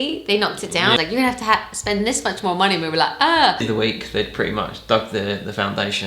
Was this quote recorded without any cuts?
no; 2 cuts; at 1.0 s, 3.6 s

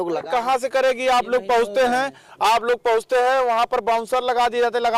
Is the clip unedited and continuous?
yes; 0 cuts

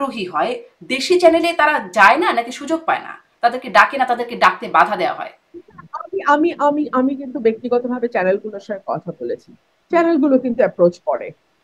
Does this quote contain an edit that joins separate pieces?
no; 0 cuts

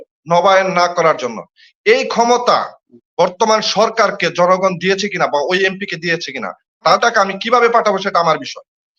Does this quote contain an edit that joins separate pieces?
yes; 1 cut; at 7.0 s

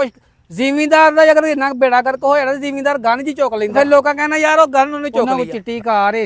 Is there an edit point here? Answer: yes; 2 cuts; at 3.7 s, 5.3 s

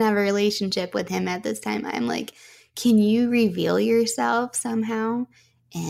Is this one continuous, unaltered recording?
yes; 0 cuts

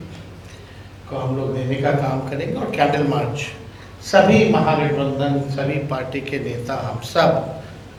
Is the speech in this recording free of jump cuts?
yes; 0 cuts

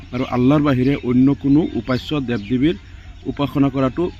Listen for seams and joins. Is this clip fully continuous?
yes; 0 cuts

